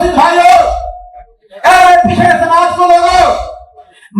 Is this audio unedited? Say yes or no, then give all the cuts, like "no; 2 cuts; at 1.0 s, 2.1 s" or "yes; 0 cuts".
yes; 0 cuts